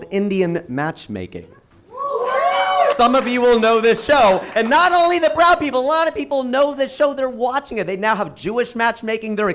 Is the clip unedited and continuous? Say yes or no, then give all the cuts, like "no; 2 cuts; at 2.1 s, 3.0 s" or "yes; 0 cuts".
yes; 0 cuts